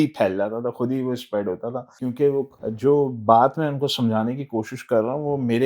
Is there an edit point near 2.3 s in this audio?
yes; 1 cut; at 2.3 s

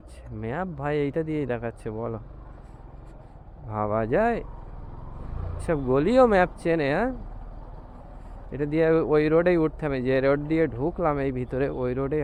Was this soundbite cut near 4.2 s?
no; 0 cuts

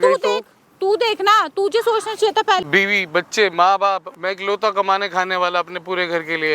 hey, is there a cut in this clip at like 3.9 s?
no; 1 cut; at 2.6 s

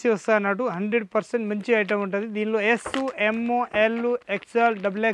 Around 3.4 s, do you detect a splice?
no; 0 cuts

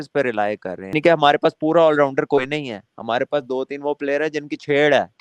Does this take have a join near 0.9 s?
yes; 1 cut; at 0.9 s

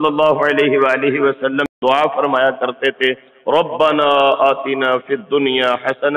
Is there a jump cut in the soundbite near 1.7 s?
yes; 1 cut; at 1.7 s

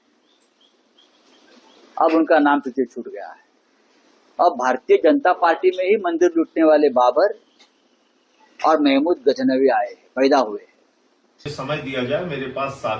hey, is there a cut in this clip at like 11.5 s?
yes; 1 cut; at 11.5 s

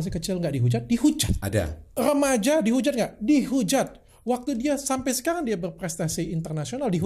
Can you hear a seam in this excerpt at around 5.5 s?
no; 2 cuts; at 1.9 s, 4.1 s

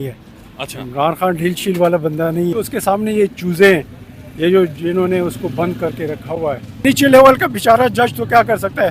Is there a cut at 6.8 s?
yes; 2 cuts; at 2.5 s, 6.8 s

